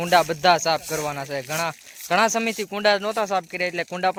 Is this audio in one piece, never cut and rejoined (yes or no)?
yes